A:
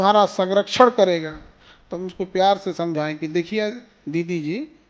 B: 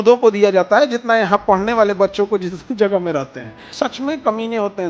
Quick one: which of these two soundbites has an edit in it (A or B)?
B